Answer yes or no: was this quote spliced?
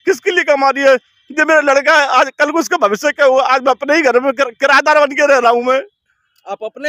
no